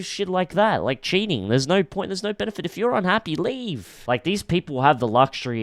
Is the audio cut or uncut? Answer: cut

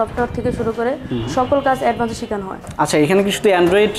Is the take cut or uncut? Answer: uncut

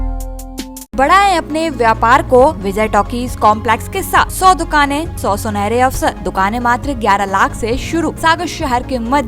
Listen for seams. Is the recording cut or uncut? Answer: cut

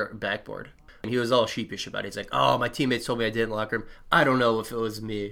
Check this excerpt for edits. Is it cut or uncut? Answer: cut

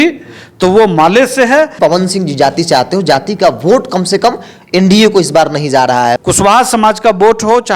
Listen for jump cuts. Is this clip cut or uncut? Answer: cut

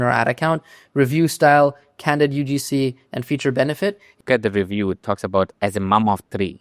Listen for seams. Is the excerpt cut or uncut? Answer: cut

